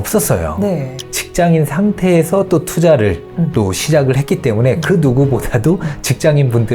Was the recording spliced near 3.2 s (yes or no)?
no